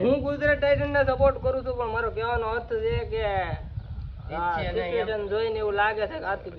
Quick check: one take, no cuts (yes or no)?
yes